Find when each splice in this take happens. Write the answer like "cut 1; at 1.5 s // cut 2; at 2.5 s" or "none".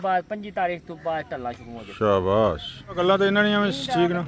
cut 1; at 3.0 s